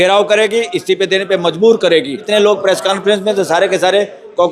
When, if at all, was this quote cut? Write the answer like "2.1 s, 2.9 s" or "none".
2.2 s